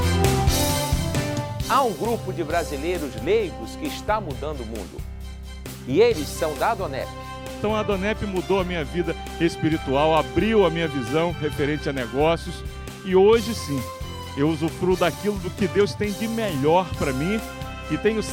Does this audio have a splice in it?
no; 0 cuts

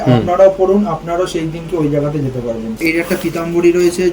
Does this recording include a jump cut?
yes; 1 cut; at 2.8 s

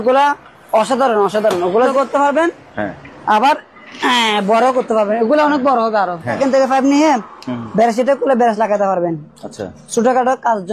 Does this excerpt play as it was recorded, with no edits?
no; 2 cuts; at 1.9 s, 6.4 s

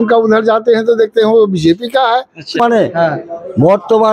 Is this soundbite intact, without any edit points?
no; 1 cut; at 2.6 s

